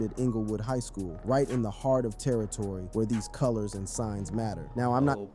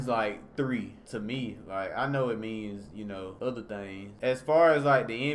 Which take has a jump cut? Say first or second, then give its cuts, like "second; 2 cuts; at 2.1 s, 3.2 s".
second; 3 cuts; at 1.0 s, 3.3 s, 4.1 s